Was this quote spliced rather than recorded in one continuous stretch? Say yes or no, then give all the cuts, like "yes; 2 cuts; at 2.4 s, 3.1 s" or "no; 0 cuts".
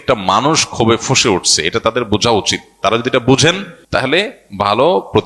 yes; 1 cut; at 3.7 s